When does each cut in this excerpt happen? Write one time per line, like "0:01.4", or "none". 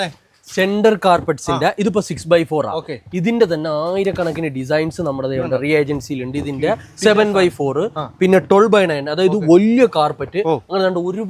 none